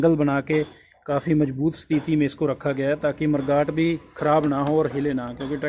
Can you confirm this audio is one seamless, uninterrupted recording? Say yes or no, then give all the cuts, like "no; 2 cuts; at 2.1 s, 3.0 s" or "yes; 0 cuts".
yes; 0 cuts